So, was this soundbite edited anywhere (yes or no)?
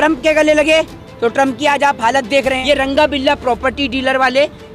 yes